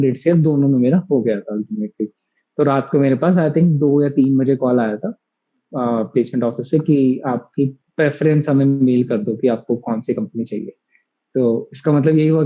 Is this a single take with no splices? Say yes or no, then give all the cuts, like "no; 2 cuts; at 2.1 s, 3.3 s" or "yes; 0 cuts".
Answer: yes; 0 cuts